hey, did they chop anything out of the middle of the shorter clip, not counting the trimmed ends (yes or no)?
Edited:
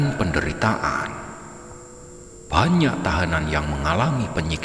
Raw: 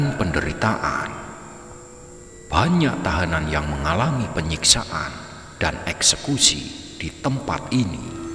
no